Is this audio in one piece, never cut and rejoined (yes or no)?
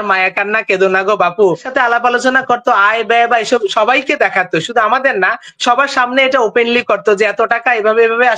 no